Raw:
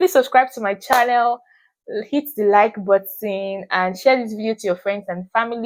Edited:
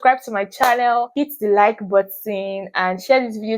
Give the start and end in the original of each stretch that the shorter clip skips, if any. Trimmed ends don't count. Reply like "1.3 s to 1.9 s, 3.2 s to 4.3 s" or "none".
1.4 s to 2.1 s